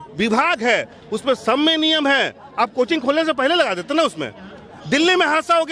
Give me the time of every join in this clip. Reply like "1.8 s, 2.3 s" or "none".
none